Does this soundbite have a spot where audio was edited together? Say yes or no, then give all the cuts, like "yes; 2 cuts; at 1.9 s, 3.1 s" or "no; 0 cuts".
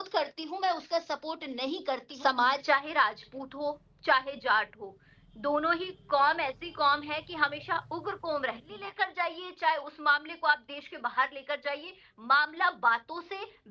yes; 2 cuts; at 2.1 s, 8.8 s